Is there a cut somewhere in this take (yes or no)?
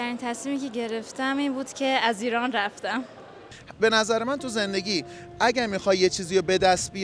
yes